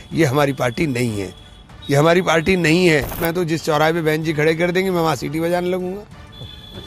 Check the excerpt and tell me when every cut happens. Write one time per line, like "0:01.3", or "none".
0:03.2